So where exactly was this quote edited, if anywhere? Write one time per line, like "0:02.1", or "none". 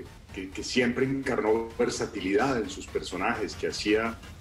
none